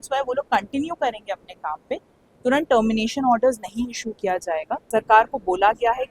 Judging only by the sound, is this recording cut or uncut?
cut